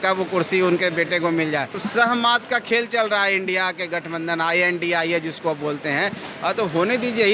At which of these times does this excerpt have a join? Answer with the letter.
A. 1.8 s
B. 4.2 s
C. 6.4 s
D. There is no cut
A